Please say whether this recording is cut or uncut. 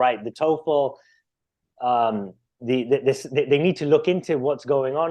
uncut